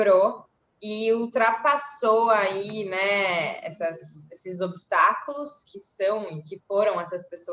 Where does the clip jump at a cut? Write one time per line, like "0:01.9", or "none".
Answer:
none